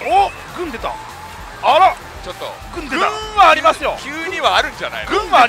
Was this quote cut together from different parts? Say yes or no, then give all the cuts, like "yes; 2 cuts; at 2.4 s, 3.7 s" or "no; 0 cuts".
no; 0 cuts